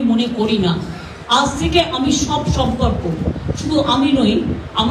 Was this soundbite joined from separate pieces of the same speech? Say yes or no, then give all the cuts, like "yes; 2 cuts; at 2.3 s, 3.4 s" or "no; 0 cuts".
no; 0 cuts